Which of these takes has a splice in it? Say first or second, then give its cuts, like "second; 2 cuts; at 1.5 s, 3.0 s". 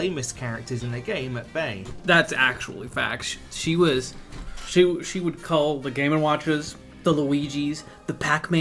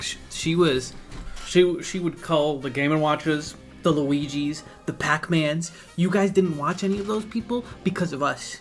first; 1 cut; at 1.9 s